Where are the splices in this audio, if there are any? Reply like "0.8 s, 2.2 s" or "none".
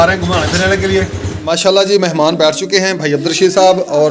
1.3 s